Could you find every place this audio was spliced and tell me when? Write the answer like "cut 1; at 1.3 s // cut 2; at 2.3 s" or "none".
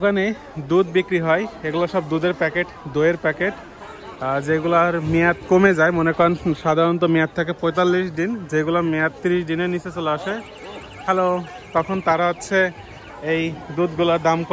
none